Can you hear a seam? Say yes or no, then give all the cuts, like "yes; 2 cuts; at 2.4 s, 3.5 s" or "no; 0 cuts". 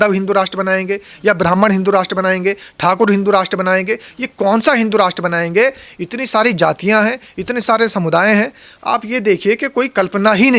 no; 0 cuts